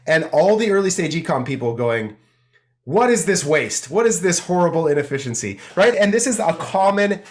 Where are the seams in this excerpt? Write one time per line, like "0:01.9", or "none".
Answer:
0:05.9